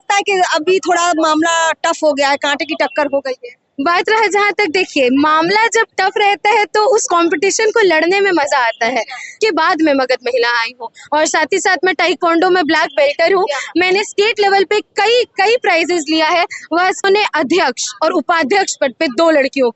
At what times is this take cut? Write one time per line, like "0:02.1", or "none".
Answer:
0:09.4
0:17.0